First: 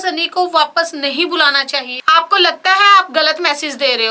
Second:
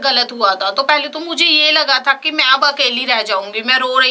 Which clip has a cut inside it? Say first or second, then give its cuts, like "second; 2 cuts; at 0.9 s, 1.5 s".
first; 1 cut; at 2.0 s